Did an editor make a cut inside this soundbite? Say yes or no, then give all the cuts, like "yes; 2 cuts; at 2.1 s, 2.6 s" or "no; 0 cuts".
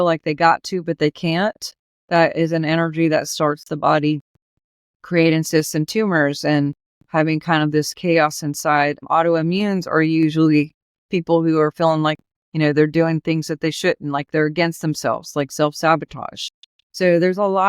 yes; 1 cut; at 9.0 s